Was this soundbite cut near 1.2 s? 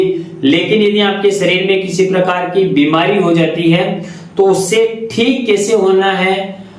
no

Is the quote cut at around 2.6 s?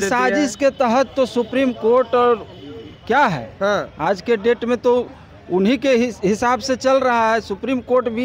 no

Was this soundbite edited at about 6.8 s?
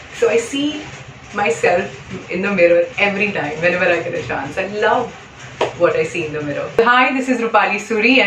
yes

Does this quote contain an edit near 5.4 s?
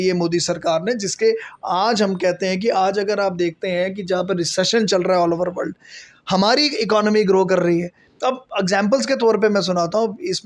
no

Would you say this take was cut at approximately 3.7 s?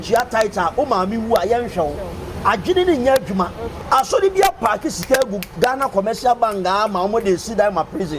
yes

